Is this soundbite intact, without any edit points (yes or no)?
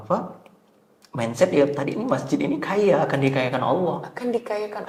yes